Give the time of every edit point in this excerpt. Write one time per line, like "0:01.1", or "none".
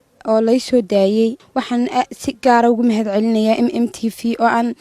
0:01.4